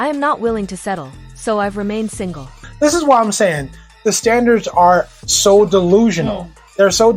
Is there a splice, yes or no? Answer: yes